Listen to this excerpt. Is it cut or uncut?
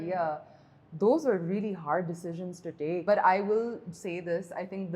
cut